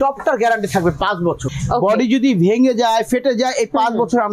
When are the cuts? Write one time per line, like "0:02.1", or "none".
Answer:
0:01.5